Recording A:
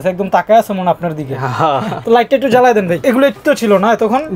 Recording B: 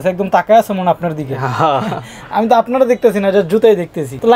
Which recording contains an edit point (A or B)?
A